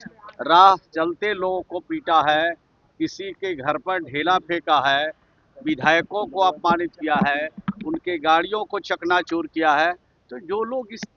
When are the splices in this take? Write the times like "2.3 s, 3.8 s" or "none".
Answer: none